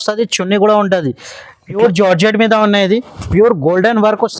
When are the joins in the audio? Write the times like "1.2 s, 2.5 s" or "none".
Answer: 1.8 s